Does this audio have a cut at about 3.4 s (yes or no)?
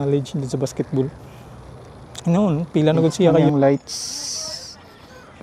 yes